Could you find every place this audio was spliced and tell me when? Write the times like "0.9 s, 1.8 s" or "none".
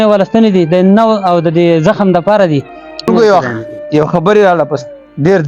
3.1 s